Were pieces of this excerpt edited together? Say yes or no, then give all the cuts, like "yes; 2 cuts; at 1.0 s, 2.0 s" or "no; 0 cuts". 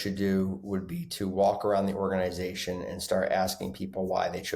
no; 0 cuts